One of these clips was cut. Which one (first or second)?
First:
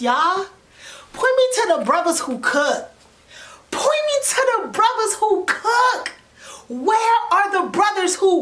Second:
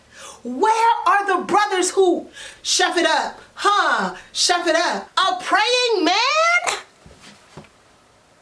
second